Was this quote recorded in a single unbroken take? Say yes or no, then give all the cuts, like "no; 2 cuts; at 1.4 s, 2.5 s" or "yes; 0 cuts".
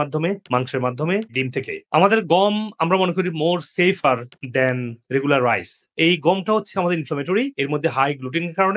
yes; 0 cuts